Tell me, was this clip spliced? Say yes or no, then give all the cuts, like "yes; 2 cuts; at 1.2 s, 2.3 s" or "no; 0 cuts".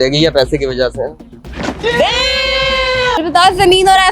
yes; 1 cut; at 3.2 s